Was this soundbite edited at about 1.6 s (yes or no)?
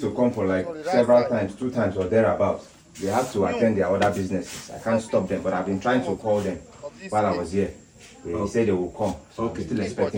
no